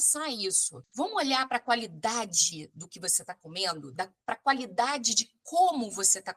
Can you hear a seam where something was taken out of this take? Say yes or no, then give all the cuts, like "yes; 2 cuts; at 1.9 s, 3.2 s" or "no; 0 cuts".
no; 0 cuts